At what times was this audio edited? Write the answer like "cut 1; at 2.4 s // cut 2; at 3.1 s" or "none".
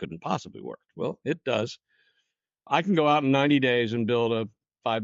cut 1; at 2.6 s